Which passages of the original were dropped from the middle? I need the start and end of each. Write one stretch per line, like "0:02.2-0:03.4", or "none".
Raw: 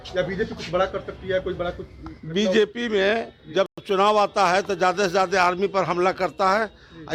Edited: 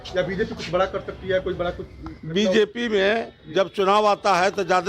0:03.7-0:03.8